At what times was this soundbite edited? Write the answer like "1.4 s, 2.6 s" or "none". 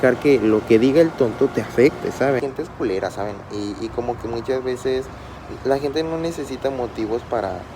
2.4 s